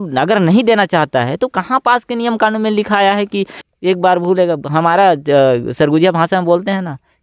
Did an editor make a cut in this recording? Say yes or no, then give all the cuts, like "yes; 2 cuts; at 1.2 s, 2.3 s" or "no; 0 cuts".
yes; 1 cut; at 3.6 s